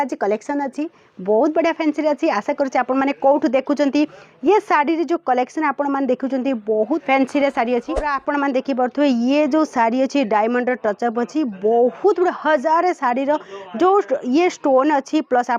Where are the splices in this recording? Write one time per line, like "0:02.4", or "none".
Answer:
0:07.0
0:08.1